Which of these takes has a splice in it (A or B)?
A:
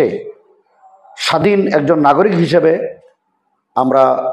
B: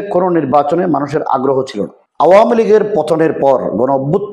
B